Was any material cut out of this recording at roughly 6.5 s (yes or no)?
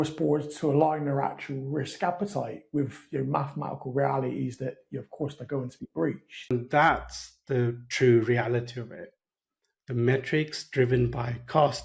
yes